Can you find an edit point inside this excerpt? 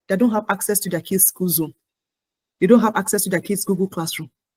no; 0 cuts

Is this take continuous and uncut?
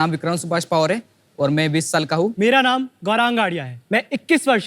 no; 2 cuts; at 2.3 s, 3.7 s

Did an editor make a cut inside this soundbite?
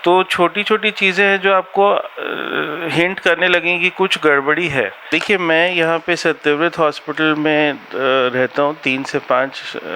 yes; 1 cut; at 5.0 s

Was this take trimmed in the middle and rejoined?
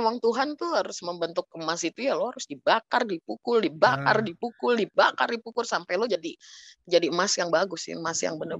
no; 0 cuts

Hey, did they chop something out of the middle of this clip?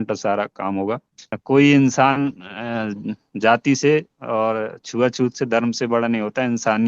yes; 1 cut; at 1.3 s

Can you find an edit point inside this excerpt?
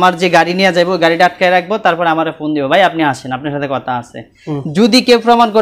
no; 0 cuts

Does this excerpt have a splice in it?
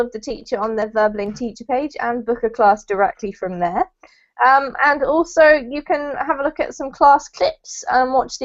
yes; 1 cut; at 7.3 s

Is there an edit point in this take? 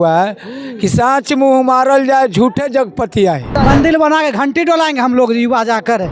yes; 1 cut; at 3.5 s

